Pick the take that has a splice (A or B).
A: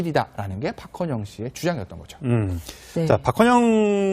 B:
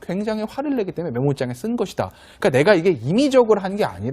A